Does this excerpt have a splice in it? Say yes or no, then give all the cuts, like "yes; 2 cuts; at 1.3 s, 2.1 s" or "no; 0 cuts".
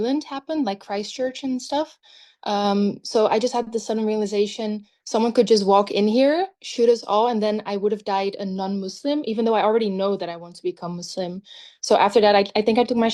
no; 0 cuts